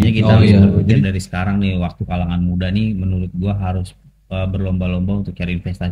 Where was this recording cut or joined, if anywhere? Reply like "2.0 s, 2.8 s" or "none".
1.0 s